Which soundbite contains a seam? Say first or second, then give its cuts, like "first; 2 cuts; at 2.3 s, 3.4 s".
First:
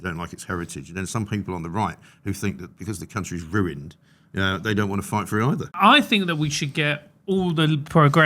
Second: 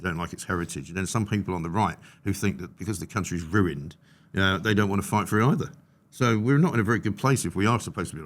first; 1 cut; at 5.8 s